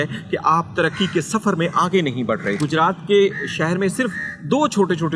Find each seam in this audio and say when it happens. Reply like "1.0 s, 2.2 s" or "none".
2.6 s